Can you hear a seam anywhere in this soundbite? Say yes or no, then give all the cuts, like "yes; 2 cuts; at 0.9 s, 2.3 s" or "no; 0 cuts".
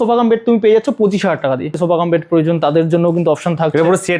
yes; 1 cut; at 1.7 s